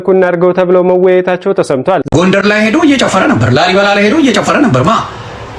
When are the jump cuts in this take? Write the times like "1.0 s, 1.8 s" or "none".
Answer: 2.0 s